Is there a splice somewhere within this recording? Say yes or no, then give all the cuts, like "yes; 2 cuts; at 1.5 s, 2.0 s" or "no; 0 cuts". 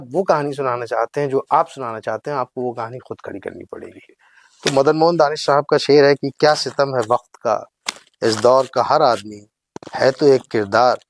no; 0 cuts